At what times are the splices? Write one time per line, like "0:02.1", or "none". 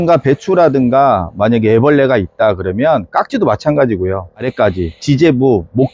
0:04.5